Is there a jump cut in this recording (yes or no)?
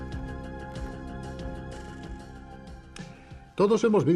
yes